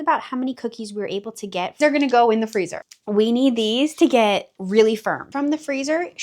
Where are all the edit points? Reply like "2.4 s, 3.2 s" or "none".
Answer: 1.8 s, 5.2 s